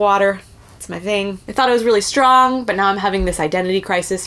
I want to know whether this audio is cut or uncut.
uncut